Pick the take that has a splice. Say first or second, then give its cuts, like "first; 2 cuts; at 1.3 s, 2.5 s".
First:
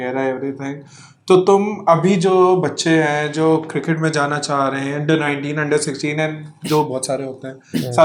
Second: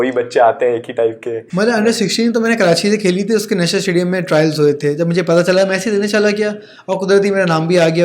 second; 1 cut; at 1.4 s